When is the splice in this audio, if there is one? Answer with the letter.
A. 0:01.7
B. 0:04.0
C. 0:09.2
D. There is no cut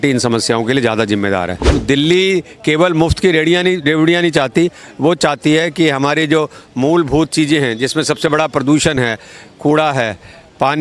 A